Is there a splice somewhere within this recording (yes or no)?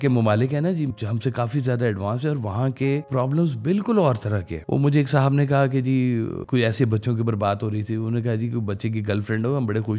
yes